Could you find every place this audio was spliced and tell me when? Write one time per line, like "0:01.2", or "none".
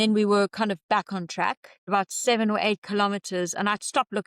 0:01.9